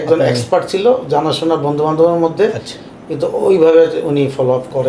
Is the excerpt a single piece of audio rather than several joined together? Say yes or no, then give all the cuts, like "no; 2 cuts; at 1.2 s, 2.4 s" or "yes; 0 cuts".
yes; 0 cuts